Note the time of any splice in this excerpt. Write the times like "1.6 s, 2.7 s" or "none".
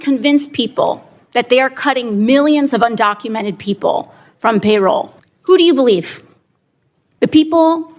5.1 s